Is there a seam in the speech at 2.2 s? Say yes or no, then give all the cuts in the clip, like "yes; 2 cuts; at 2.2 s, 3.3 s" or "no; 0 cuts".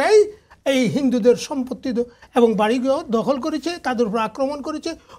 no; 0 cuts